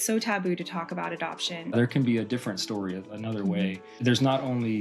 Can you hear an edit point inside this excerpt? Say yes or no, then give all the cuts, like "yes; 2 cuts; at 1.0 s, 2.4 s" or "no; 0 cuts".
yes; 2 cuts; at 1.7 s, 4.0 s